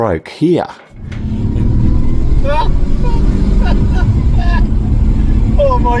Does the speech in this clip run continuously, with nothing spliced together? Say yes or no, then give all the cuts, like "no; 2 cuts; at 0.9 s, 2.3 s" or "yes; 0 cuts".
no; 1 cut; at 1.1 s